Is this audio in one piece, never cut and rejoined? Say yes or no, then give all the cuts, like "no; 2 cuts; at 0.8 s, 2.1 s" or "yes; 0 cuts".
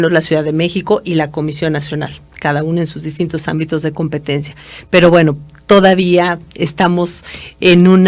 yes; 0 cuts